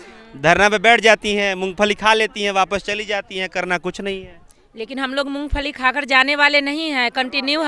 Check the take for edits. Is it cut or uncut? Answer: uncut